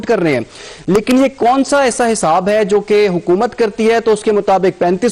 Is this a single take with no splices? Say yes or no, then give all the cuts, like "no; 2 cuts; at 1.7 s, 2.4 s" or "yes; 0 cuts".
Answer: yes; 0 cuts